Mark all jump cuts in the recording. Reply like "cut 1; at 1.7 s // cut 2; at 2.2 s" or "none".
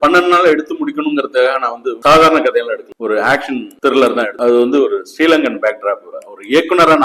cut 1; at 4.3 s // cut 2; at 6.1 s